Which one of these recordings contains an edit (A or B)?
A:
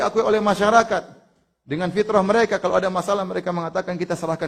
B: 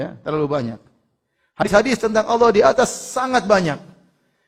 B